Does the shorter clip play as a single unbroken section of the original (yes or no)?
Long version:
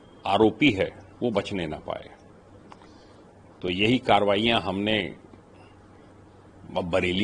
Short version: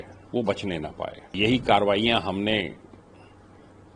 no